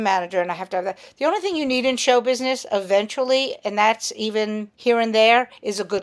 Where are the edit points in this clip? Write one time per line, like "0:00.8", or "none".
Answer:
none